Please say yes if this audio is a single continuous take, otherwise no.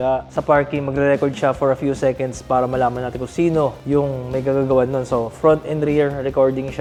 yes